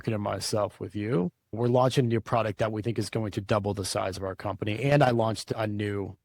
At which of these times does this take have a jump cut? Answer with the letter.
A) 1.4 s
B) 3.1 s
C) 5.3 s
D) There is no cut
A